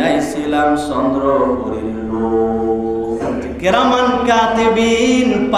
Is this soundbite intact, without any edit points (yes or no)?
no